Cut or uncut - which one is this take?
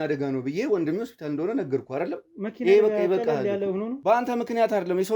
cut